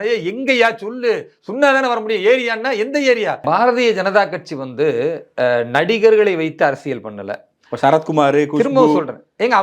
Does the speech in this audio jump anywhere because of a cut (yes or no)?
yes